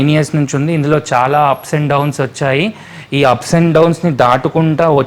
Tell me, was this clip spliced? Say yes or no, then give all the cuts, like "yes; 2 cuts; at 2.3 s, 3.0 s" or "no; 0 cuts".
no; 0 cuts